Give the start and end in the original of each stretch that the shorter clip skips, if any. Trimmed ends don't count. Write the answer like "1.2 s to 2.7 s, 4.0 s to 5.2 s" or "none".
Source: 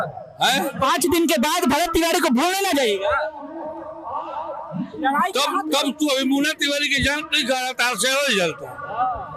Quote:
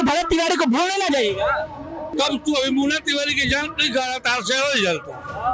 3.8 s to 5.7 s